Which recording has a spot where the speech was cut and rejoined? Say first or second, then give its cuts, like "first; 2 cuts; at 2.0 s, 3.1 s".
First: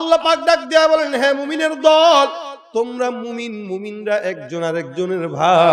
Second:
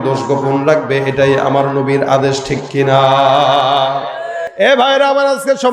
second; 1 cut; at 4.4 s